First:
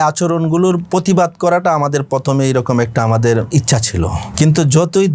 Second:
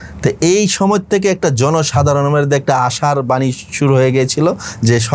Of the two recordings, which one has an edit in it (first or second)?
first